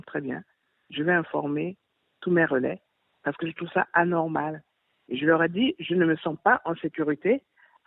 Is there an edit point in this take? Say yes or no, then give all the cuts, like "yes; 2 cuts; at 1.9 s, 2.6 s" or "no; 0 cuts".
no; 0 cuts